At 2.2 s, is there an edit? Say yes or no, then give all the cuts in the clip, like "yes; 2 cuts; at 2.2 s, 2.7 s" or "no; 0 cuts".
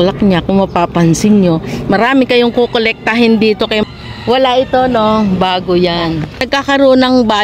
no; 2 cuts; at 3.8 s, 6.5 s